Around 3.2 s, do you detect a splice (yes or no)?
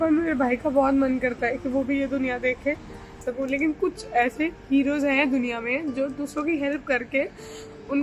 yes